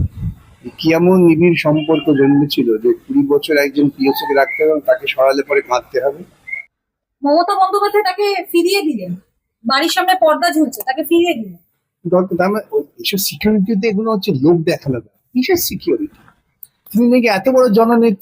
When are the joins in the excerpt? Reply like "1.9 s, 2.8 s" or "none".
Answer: none